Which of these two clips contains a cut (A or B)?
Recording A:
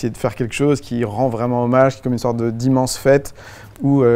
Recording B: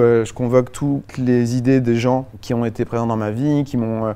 B